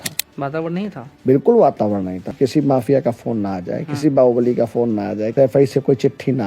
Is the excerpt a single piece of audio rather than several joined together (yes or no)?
no